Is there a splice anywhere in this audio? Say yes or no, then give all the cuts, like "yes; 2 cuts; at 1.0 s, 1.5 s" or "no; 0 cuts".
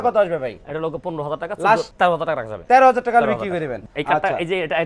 yes; 2 cuts; at 1.9 s, 3.8 s